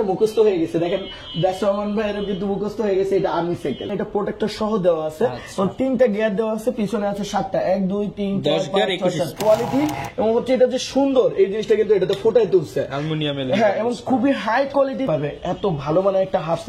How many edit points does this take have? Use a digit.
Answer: 3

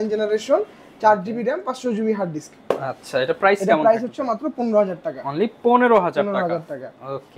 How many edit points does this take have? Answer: 0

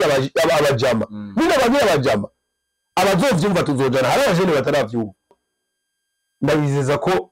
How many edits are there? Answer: 1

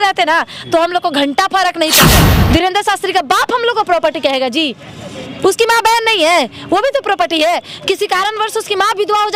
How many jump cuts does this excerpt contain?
1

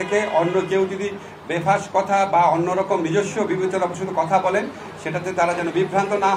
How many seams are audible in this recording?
0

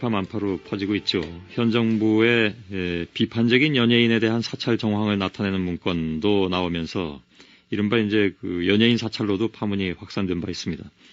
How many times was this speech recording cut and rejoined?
1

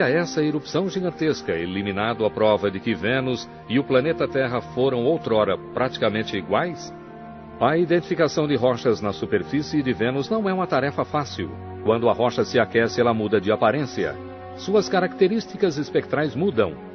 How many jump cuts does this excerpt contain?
1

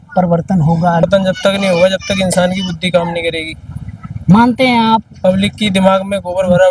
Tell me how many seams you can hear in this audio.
1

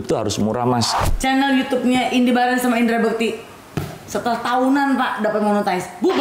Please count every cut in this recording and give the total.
1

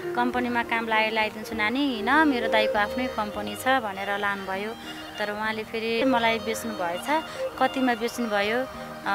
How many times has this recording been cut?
1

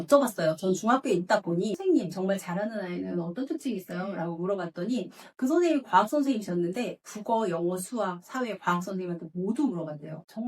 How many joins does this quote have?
1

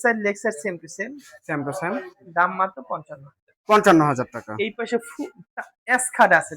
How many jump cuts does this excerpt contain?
0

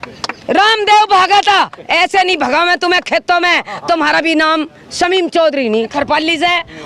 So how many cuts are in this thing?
1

